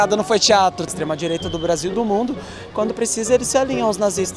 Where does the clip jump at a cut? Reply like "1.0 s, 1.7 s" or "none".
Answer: 0.9 s

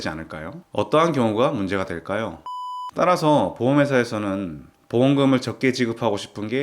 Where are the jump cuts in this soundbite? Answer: 2.6 s

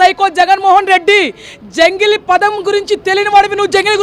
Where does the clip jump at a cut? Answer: none

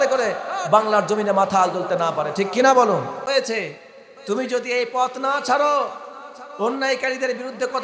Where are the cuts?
3.2 s

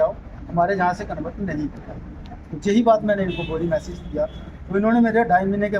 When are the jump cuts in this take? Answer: none

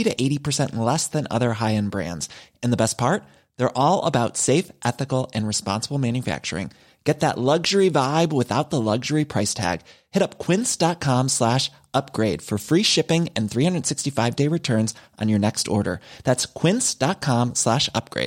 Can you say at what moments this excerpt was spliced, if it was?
none

